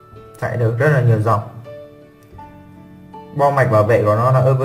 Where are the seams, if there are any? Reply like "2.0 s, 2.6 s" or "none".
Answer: 1.6 s, 3.3 s

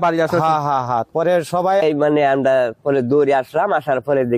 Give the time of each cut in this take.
1.8 s

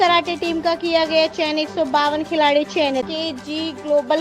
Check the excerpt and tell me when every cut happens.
3.1 s

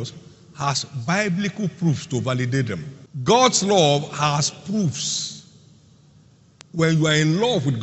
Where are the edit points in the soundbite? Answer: 3.2 s

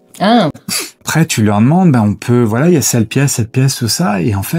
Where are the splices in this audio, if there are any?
1.0 s

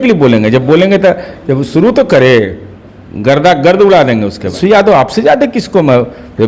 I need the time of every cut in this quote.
4.6 s

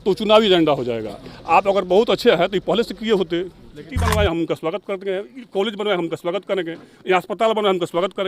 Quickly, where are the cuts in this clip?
3.9 s

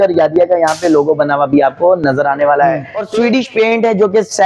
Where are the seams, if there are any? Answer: 3.0 s

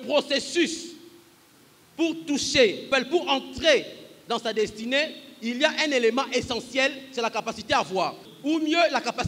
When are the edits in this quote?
2.9 s, 8.3 s

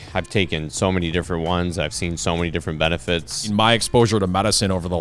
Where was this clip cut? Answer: 3.5 s

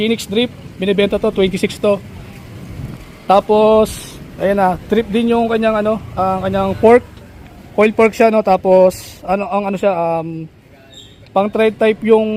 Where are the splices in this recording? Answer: none

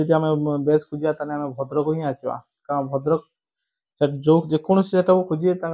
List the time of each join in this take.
none

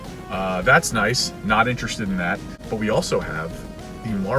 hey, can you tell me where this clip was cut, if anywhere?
2.5 s

